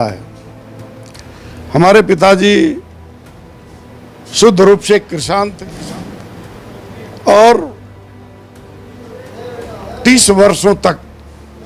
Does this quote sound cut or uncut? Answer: cut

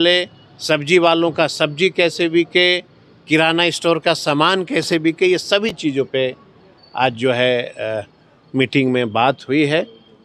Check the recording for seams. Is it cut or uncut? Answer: uncut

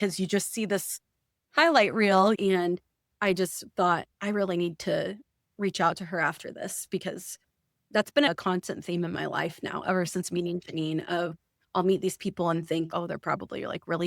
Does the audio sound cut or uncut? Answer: cut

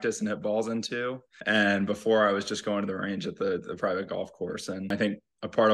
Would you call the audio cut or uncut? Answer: cut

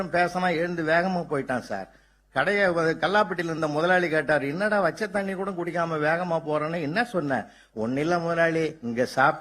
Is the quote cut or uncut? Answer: uncut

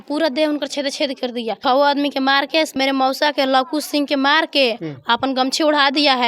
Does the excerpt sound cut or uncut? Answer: cut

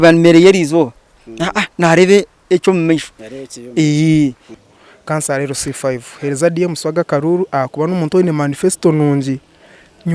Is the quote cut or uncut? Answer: cut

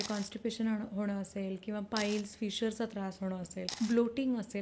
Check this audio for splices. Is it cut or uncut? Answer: cut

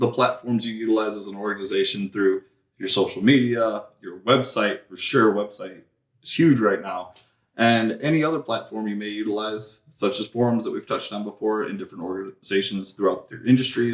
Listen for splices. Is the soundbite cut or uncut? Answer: uncut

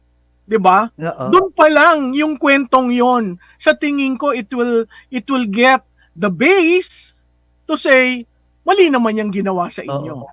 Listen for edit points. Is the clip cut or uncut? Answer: uncut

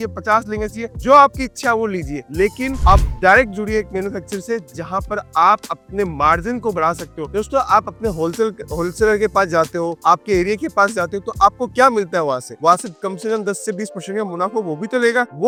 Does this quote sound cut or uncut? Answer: uncut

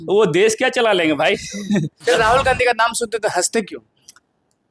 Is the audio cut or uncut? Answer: cut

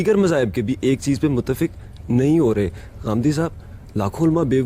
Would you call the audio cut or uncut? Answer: uncut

